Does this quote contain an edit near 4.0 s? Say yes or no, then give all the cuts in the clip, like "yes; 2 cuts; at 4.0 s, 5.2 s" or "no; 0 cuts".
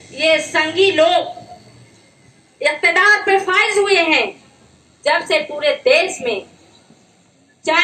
no; 0 cuts